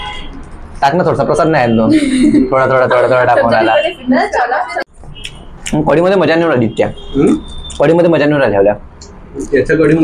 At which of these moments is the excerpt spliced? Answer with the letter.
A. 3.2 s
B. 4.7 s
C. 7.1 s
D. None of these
B